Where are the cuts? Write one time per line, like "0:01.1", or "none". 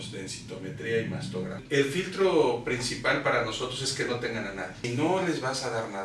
0:01.6
0:04.8